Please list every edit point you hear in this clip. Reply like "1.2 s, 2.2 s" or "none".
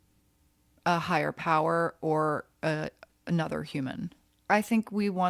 4.3 s